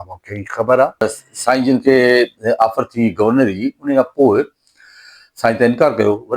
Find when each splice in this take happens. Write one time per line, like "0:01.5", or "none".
0:01.2